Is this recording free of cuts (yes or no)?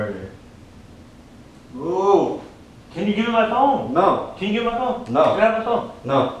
no